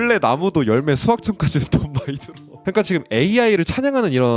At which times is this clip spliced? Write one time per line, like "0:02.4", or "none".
0:02.5